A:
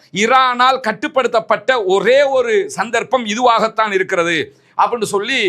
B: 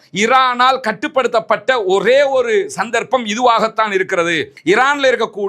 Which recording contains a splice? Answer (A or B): B